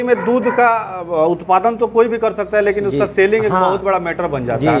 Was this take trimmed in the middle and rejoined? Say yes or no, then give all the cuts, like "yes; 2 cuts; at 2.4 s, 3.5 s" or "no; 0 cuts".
no; 0 cuts